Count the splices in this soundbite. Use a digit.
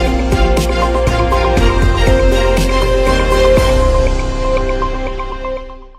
0